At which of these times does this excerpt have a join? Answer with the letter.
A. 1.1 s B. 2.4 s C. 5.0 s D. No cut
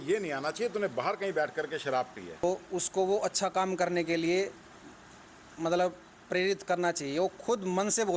B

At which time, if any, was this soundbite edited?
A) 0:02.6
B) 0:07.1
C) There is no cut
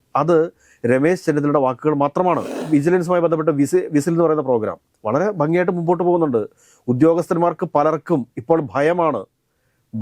A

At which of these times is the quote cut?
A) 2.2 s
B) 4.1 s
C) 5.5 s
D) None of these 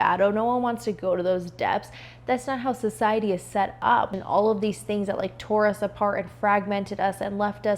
B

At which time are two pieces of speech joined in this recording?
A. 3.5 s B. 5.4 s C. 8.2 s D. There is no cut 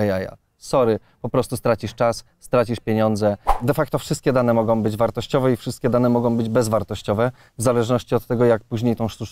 A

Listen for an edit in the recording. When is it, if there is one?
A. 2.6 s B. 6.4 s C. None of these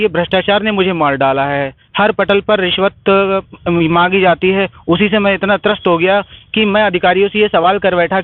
C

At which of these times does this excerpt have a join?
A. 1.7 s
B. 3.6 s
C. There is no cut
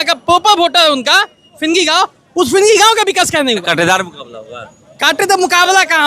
B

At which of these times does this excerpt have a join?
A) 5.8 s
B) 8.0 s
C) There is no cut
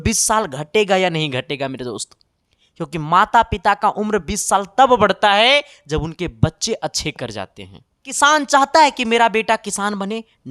B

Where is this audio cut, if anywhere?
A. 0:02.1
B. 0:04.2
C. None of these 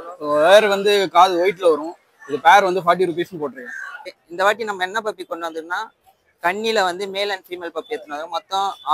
B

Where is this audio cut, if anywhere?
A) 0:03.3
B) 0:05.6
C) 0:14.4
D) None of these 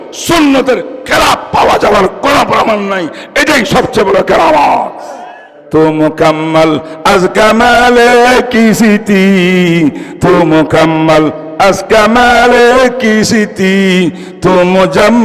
B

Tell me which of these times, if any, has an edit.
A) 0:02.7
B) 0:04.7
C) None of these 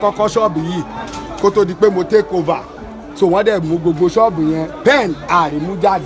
A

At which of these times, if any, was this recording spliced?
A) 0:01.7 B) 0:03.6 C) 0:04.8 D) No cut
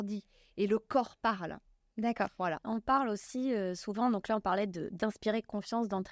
D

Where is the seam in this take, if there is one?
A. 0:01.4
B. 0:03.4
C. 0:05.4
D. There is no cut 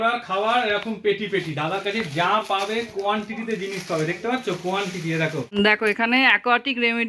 C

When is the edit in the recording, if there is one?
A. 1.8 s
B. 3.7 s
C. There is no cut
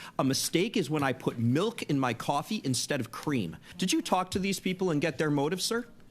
B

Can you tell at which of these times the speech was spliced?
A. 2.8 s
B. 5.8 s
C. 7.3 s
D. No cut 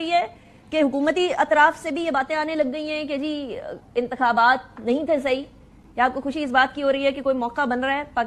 D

